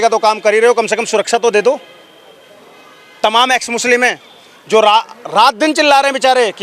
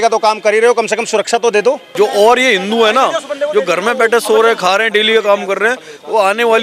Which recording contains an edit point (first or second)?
second